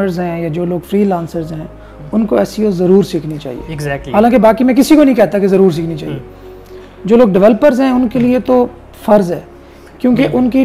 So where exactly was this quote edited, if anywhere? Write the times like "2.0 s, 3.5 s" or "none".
none